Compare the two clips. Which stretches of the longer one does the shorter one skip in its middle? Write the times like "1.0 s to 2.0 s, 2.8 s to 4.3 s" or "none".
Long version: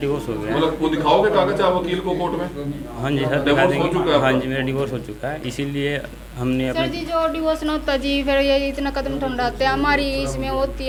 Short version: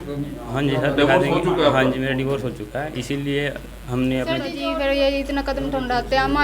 7.1 s to 8.1 s